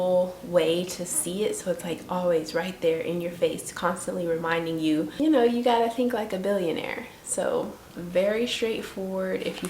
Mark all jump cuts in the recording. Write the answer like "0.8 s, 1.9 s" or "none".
5.1 s, 7.9 s